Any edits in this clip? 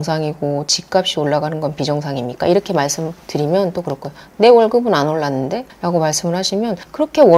no; 0 cuts

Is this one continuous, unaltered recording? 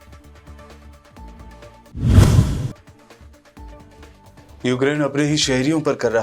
no; 1 cut; at 1.1 s

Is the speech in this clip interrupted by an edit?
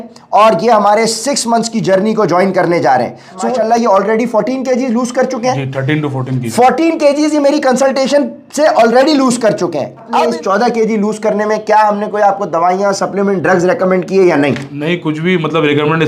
yes; 2 cuts; at 3.6 s, 10.3 s

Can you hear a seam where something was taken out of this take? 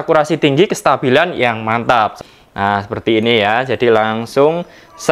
yes; 1 cut; at 2.2 s

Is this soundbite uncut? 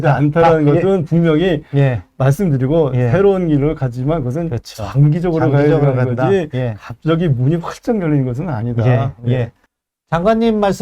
no; 1 cut; at 9.6 s

